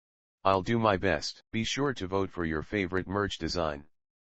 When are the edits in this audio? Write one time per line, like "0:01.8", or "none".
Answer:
0:01.3